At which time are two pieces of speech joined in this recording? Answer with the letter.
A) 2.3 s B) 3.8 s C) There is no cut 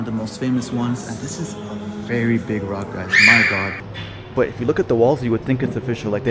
B